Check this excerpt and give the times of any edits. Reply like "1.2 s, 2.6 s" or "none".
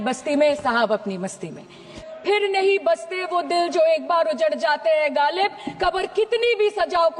2.1 s